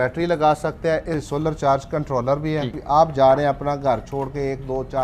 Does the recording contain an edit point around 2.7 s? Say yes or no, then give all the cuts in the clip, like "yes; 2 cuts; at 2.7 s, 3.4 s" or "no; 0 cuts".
yes; 2 cuts; at 1.3 s, 2.7 s